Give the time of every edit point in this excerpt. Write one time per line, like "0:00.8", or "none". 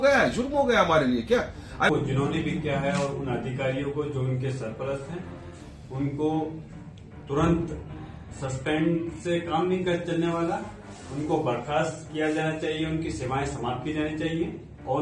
0:01.9